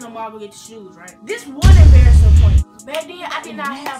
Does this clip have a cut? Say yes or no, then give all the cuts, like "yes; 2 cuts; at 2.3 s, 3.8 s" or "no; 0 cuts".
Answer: yes; 1 cut; at 1.2 s